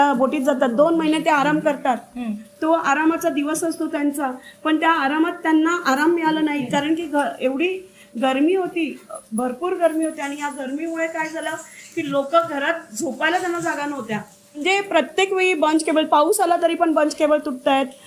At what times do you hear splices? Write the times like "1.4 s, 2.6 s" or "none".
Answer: 14.6 s